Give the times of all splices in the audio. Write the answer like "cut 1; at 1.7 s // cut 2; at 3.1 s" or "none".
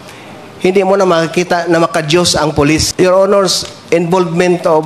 cut 1; at 2.9 s